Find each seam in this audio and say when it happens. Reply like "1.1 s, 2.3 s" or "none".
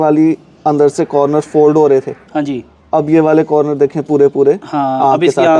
none

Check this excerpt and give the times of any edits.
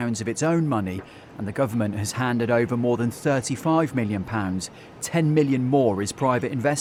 none

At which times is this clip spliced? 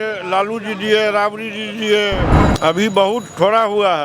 2.4 s

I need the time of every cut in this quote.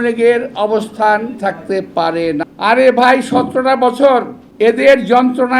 2.5 s, 4.4 s

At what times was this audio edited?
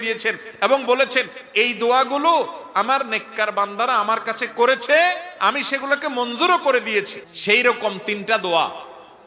7.2 s

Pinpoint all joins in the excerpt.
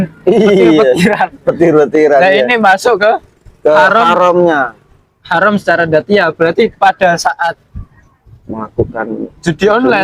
none

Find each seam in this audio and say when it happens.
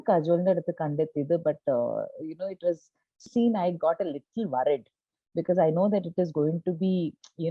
3.3 s

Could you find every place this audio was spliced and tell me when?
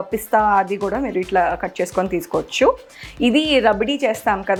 none

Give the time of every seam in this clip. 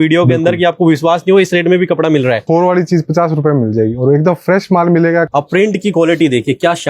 2.4 s, 5.3 s

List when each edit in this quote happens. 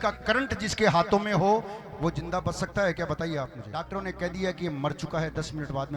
3.7 s

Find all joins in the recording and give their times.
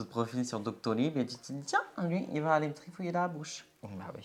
none

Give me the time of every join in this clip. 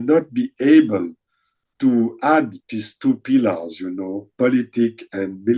none

